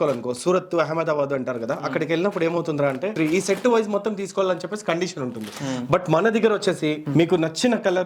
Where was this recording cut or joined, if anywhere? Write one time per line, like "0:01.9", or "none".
0:03.1
0:07.0